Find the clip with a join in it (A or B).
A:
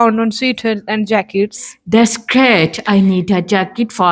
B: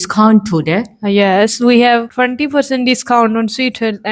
B